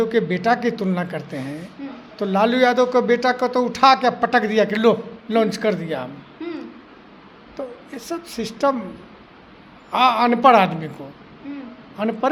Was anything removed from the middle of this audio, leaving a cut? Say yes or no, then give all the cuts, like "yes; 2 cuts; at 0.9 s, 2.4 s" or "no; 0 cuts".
no; 0 cuts